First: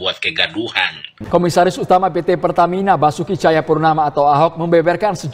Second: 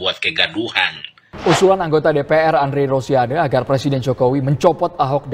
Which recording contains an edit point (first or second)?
first